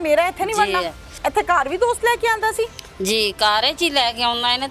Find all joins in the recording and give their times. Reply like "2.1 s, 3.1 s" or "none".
1.2 s